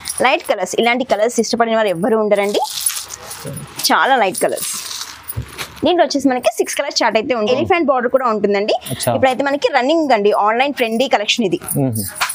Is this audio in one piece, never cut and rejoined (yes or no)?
no